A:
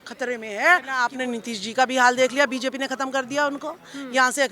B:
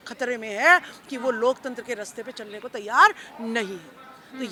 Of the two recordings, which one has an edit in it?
A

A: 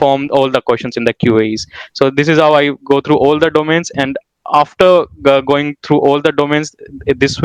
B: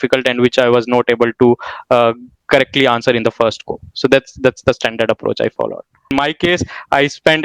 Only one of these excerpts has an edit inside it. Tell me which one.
B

